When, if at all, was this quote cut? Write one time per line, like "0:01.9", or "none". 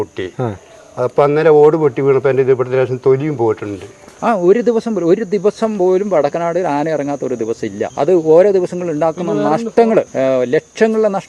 0:04.1
0:07.9
0:10.1